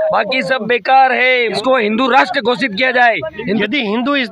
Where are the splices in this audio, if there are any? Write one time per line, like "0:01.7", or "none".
0:01.6
0:03.6